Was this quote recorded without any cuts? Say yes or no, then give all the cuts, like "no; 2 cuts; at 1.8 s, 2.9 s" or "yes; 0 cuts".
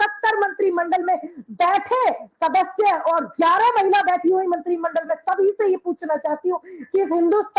yes; 0 cuts